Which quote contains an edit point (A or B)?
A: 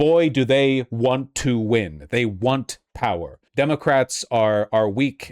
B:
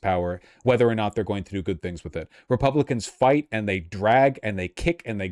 A